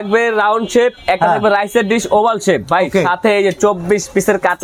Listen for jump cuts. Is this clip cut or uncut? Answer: uncut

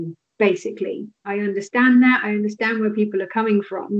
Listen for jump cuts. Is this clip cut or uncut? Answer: cut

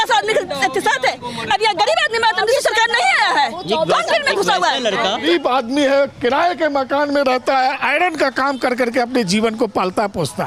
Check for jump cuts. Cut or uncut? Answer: cut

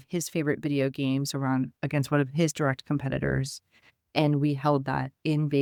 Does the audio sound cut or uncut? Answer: uncut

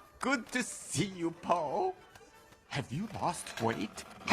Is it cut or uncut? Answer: cut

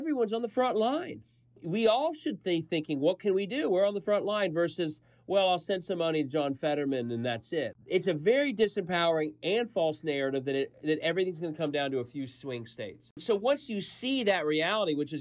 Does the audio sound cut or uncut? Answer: cut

